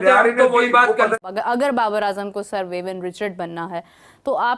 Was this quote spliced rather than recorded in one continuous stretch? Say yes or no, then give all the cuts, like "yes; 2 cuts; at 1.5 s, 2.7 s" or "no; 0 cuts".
yes; 1 cut; at 1.2 s